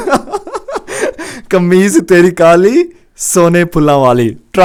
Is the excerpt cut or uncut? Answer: uncut